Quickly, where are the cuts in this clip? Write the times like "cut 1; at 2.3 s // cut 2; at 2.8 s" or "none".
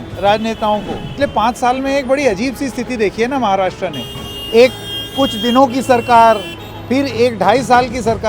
cut 1; at 1.1 s